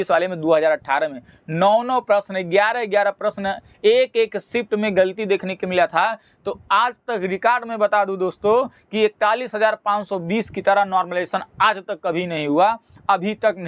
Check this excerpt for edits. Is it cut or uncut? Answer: uncut